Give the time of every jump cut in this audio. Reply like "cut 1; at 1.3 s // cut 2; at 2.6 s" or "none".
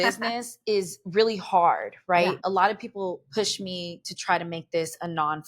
cut 1; at 2.4 s

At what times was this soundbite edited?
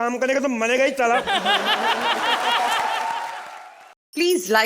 cut 1; at 3.4 s

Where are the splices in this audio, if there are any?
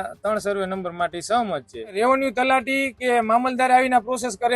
cut 1; at 2.0 s

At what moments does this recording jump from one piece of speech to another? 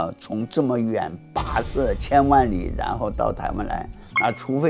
cut 1; at 2.0 s

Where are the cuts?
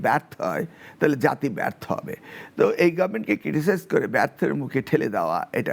none

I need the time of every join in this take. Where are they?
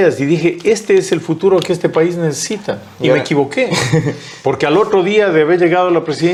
none

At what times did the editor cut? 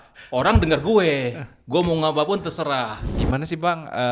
cut 1; at 3.1 s

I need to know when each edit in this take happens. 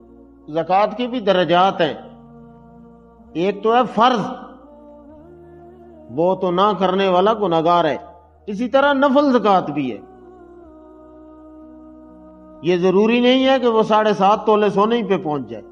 none

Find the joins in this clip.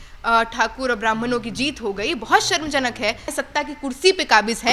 cut 1; at 3.3 s

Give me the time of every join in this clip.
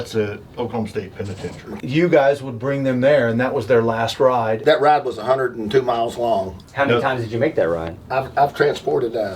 cut 1; at 1.7 s // cut 2; at 4.6 s // cut 3; at 6.5 s

